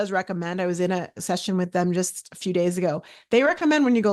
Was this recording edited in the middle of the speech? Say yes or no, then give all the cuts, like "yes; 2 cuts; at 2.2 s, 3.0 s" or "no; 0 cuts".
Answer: no; 0 cuts